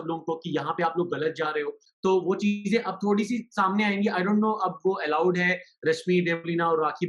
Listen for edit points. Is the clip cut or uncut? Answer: cut